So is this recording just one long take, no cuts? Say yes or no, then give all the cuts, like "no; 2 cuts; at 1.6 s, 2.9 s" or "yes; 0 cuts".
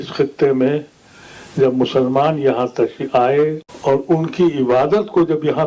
no; 1 cut; at 3.7 s